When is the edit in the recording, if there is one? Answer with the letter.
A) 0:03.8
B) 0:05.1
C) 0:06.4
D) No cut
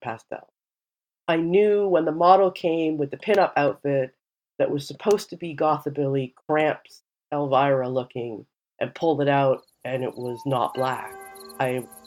D